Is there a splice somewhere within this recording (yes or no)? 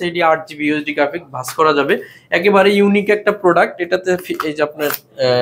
no